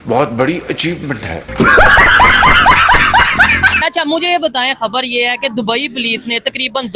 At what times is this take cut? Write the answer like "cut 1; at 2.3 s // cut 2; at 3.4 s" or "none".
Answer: cut 1; at 3.8 s